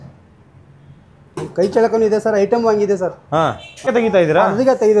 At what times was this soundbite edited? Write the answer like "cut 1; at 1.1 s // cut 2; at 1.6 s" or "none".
cut 1; at 3.8 s